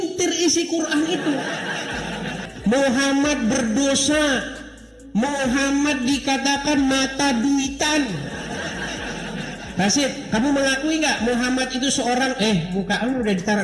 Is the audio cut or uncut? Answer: cut